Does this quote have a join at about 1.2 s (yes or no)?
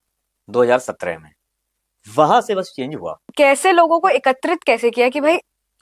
no